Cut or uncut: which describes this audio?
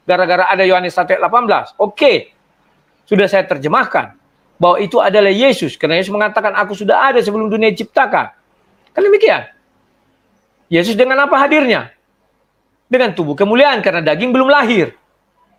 uncut